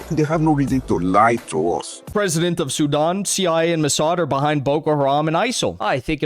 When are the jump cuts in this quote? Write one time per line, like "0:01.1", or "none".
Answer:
0:02.0